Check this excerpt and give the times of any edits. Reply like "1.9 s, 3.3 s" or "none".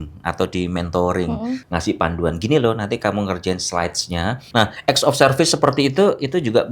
1.6 s, 4.4 s